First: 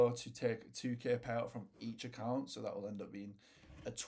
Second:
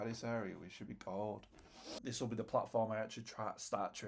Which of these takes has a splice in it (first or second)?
second